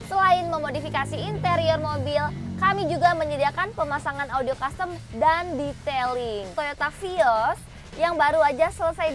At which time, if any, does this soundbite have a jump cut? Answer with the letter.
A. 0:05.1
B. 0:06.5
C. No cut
B